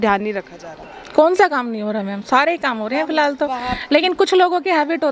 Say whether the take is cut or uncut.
uncut